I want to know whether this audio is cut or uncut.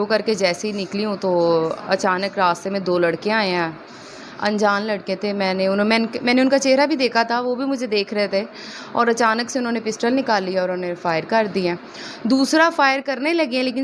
uncut